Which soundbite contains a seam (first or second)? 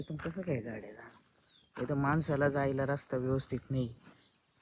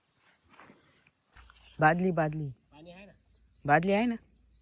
second